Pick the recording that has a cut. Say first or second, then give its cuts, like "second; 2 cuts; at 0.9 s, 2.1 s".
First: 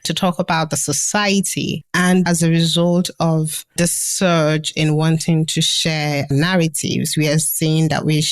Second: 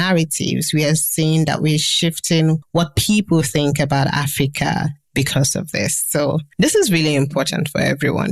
first; 1 cut; at 2.2 s